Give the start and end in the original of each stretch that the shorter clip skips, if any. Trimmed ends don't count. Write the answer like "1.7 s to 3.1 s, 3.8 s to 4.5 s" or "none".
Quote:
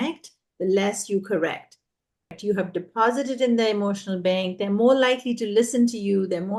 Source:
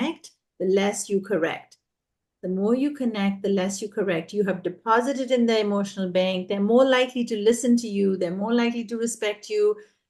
2.4 s to 4.3 s